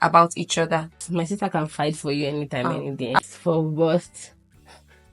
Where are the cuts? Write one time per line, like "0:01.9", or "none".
0:01.0
0:03.2